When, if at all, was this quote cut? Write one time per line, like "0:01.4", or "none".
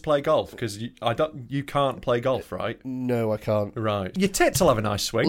0:04.1